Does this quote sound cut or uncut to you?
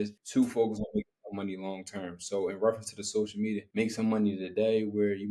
uncut